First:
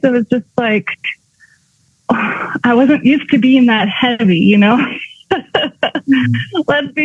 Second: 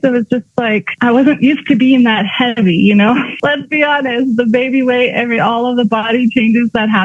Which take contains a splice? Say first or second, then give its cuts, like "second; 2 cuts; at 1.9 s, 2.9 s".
second; 2 cuts; at 0.9 s, 3.4 s